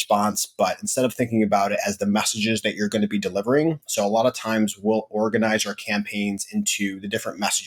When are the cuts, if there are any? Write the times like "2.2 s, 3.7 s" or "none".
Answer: none